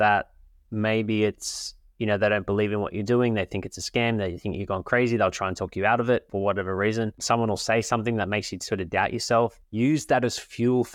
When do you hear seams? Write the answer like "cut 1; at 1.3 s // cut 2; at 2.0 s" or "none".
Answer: cut 1; at 6.3 s // cut 2; at 7.2 s // cut 3; at 9.6 s